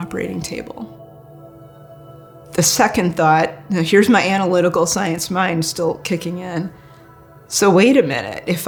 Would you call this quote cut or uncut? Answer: uncut